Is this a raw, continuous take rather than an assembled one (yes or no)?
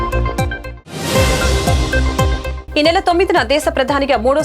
yes